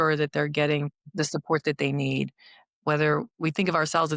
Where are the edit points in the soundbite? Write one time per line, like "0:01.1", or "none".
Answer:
0:01.0

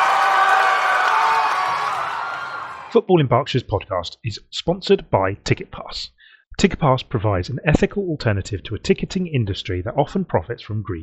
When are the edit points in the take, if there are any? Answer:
0:02.7

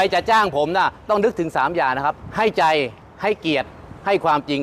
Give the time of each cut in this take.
0:02.2
0:03.0

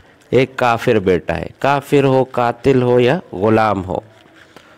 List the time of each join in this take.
none

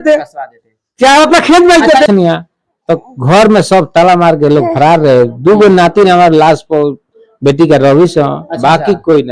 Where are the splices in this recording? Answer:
0:02.1

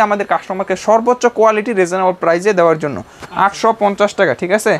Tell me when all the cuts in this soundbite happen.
none

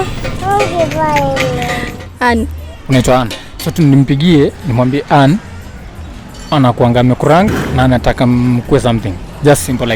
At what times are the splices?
0:01.8

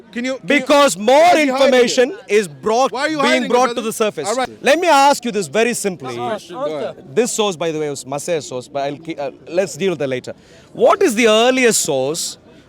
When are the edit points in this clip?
0:04.5

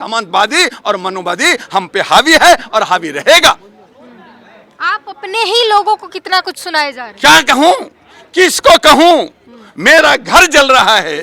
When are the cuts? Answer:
none

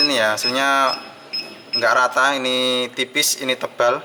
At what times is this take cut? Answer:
none

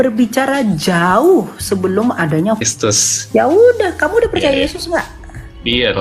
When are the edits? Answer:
0:02.6

